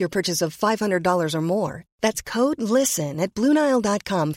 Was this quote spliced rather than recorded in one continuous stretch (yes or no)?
no